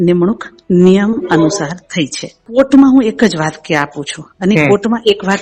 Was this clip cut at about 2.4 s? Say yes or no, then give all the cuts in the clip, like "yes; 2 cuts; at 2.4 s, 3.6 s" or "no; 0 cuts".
yes; 1 cut; at 2.4 s